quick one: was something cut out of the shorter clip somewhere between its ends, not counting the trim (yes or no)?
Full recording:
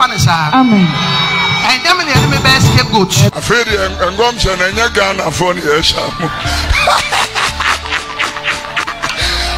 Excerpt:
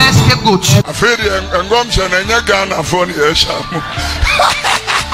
no